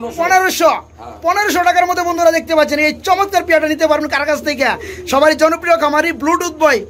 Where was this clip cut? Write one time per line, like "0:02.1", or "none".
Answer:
none

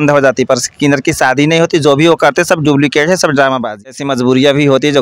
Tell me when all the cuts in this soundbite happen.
0:03.8

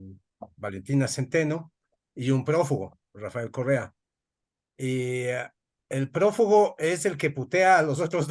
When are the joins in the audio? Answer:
none

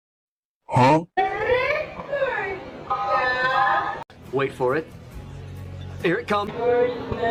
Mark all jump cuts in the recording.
none

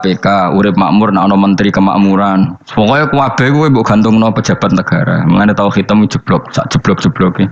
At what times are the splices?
none

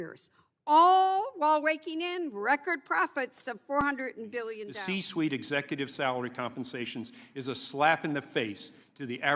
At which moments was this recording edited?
0:04.7

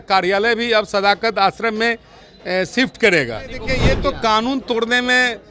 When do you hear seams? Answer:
0:03.6

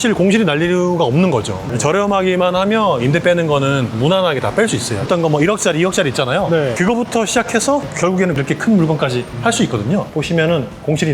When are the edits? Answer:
0:05.0
0:10.1

